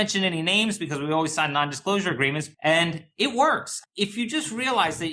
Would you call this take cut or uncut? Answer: cut